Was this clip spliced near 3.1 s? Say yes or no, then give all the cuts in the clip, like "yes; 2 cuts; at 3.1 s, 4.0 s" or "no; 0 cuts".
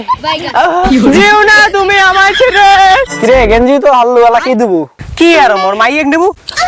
yes; 1 cut; at 3.1 s